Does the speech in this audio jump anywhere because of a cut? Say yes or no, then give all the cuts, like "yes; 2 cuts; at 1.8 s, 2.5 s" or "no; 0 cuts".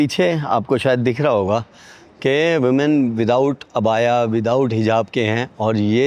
no; 0 cuts